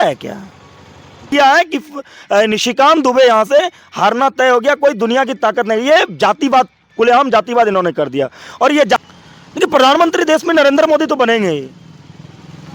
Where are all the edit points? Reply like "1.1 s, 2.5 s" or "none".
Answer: 1.3 s, 9.0 s